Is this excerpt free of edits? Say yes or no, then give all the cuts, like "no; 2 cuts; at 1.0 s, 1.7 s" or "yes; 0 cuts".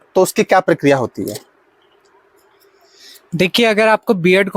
yes; 0 cuts